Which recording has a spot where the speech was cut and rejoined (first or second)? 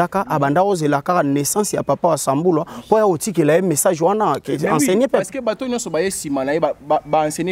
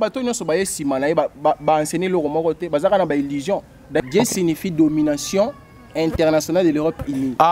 second